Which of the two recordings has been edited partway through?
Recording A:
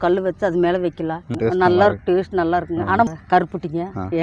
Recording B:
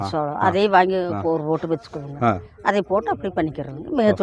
A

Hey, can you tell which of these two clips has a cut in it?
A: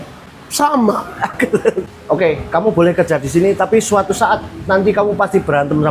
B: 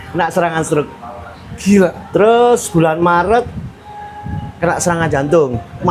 A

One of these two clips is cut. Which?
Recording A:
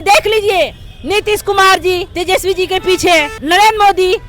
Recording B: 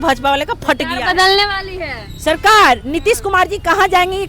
A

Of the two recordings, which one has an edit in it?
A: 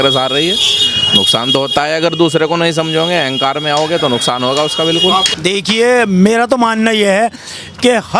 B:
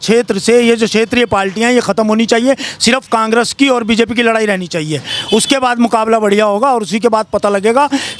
A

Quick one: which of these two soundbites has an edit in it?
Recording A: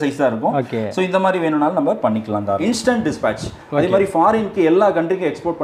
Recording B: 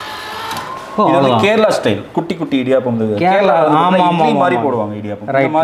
A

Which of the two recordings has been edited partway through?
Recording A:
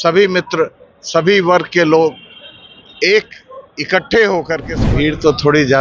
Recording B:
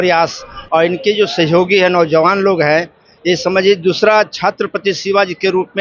A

